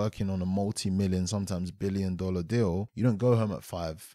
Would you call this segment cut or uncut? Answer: cut